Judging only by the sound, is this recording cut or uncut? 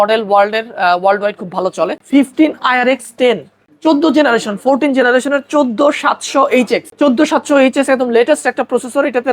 cut